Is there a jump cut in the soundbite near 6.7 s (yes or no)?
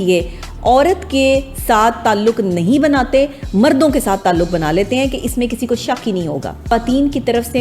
yes